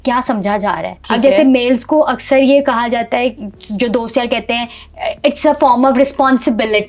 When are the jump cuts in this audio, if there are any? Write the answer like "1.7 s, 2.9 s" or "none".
0.9 s